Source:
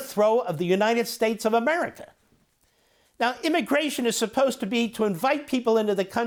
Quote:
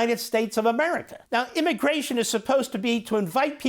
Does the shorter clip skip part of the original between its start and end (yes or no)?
yes